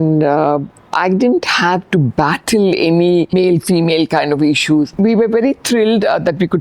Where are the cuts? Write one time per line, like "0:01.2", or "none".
0:03.3
0:04.9